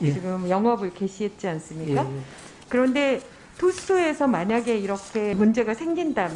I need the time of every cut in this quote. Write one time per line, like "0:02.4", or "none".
none